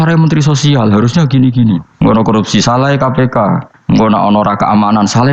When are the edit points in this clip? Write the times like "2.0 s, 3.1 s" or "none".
1.9 s, 3.7 s